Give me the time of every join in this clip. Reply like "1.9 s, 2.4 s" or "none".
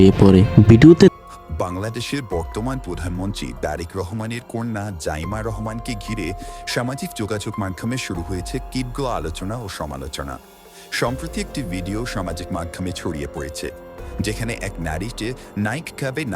1.1 s